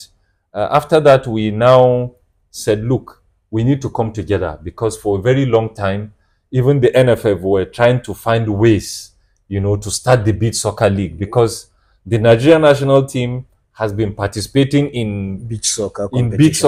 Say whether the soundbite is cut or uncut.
uncut